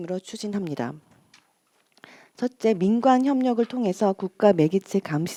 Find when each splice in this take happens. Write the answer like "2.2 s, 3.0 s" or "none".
none